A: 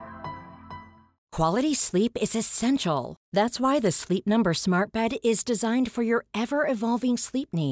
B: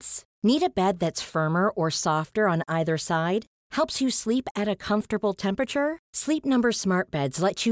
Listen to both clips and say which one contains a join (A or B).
A